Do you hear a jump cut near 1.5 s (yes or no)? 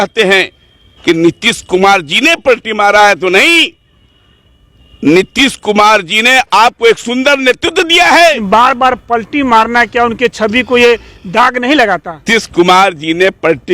no